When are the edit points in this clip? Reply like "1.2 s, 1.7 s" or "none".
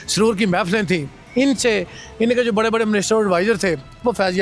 1.2 s